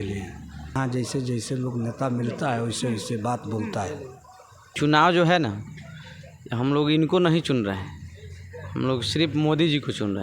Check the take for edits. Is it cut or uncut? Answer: cut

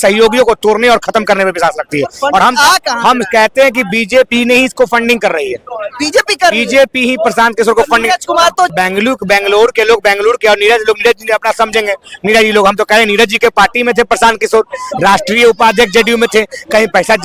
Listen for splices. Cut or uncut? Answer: uncut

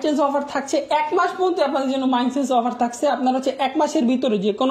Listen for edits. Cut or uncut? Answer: uncut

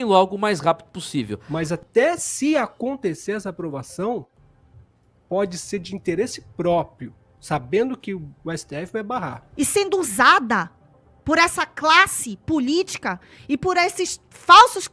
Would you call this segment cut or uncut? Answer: cut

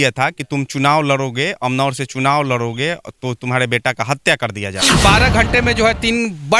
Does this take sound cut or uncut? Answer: cut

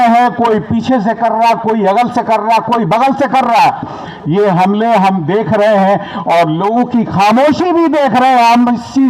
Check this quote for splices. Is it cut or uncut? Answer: uncut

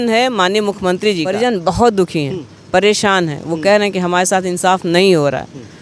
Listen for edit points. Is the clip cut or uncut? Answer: cut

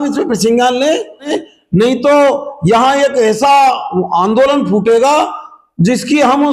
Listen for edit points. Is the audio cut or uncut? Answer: cut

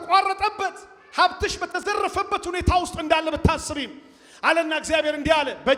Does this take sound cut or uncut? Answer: uncut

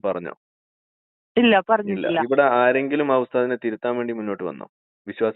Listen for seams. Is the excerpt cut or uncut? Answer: cut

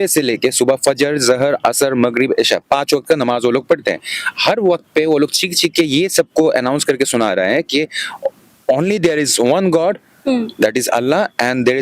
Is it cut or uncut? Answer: uncut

